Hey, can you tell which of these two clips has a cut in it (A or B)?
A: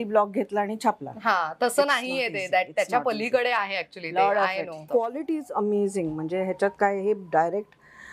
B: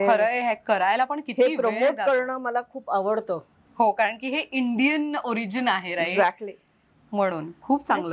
A